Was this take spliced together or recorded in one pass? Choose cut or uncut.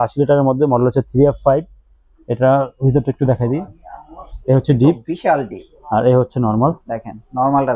uncut